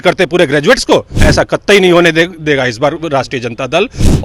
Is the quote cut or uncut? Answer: cut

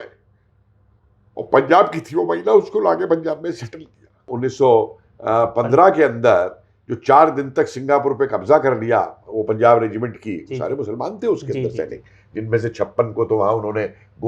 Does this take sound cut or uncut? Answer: cut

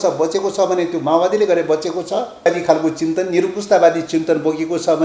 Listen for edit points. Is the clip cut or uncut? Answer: cut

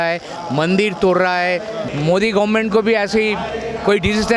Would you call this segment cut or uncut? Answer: cut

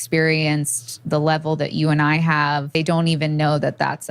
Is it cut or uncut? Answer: cut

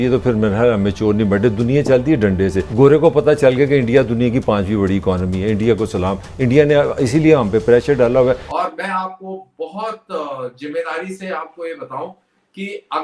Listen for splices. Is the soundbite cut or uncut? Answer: cut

